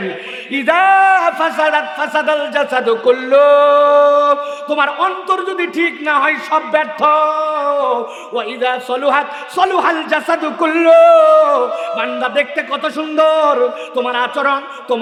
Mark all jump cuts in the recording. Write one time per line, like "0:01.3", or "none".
none